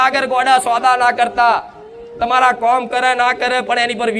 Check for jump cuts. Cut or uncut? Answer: uncut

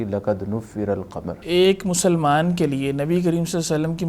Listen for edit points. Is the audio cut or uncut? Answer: cut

